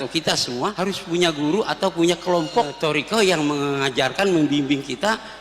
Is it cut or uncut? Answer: cut